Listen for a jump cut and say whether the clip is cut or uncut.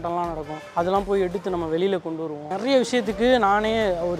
cut